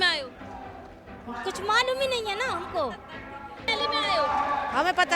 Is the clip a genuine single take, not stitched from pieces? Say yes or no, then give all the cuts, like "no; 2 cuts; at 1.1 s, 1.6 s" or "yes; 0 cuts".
no; 1 cut; at 3.7 s